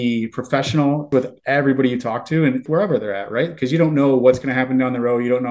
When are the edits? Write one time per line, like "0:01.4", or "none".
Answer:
0:01.1
0:02.6